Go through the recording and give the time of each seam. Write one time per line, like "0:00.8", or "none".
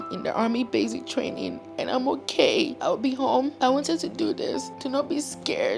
0:02.8
0:03.5
0:04.7